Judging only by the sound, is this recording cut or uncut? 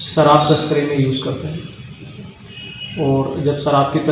uncut